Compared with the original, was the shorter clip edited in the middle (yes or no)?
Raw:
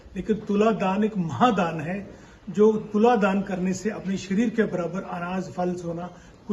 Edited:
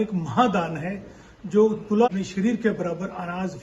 yes